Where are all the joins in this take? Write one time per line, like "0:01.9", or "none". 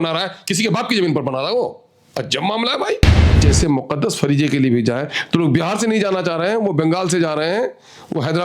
0:03.3